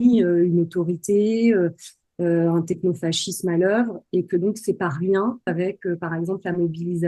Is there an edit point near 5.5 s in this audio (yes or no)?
yes